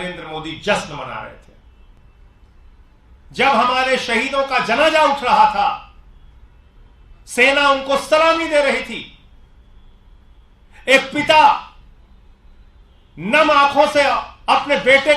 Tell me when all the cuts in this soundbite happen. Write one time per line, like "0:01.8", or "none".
0:02.0